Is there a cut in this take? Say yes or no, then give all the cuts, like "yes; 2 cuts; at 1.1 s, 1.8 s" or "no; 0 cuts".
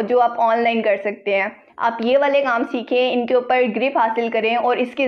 no; 0 cuts